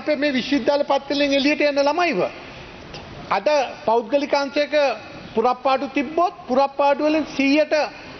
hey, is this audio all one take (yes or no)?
yes